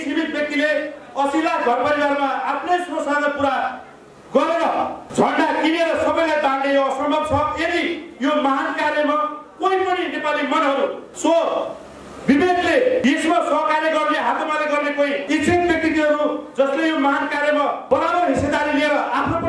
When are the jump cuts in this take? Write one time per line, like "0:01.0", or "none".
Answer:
0:05.0
0:11.0
0:13.0
0:15.2
0:17.8